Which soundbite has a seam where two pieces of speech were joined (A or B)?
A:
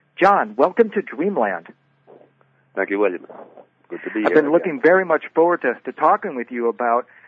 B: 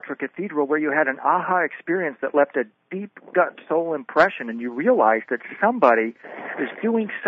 A